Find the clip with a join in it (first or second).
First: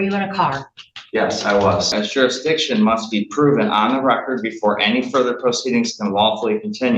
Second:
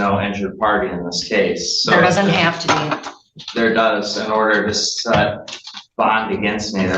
first